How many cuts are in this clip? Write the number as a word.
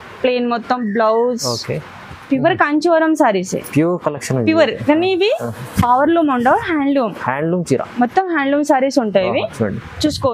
one